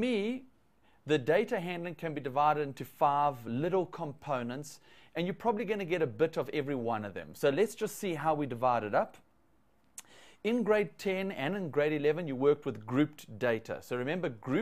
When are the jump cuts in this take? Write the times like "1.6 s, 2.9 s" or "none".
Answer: 11.2 s